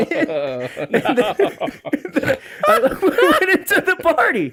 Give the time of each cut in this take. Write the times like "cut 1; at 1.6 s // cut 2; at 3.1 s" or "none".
none